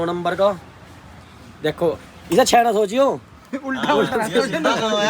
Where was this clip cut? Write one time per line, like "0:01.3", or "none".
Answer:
none